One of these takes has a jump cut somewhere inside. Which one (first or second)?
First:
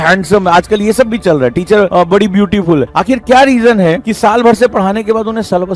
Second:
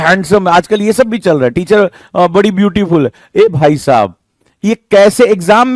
first